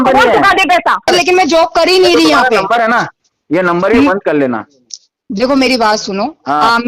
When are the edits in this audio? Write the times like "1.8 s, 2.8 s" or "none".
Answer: 1.1 s